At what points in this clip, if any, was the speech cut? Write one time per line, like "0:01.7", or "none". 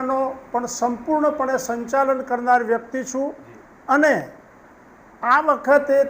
none